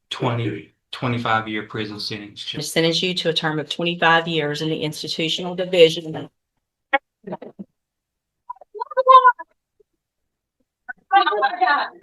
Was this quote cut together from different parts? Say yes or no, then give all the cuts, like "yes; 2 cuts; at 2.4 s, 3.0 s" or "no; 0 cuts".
yes; 1 cut; at 2.6 s